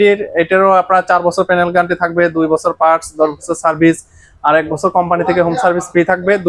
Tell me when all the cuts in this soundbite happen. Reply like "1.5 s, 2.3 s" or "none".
none